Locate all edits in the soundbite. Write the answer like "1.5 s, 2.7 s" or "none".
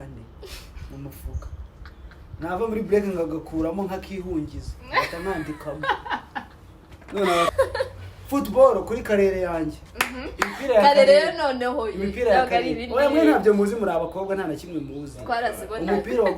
7.5 s

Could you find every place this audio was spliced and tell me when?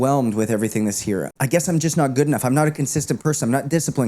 1.3 s

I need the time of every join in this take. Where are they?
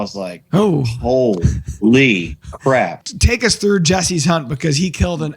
3.0 s

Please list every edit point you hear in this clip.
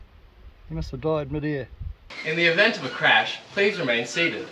2.1 s

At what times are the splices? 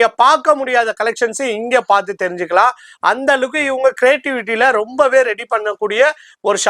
none

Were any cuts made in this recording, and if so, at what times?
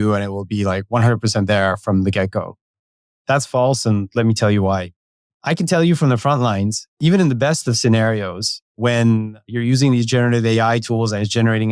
5.3 s, 7.0 s, 8.8 s, 9.5 s

